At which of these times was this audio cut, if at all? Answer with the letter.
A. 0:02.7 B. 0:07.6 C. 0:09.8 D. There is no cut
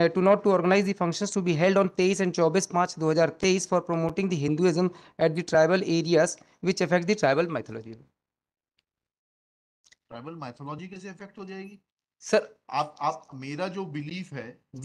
D